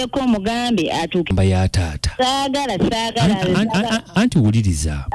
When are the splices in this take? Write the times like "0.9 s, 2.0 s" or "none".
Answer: 1.3 s